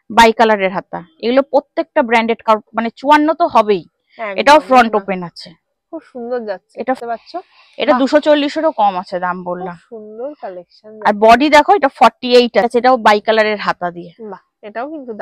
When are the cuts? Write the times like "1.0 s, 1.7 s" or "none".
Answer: 2.5 s, 7.0 s, 12.7 s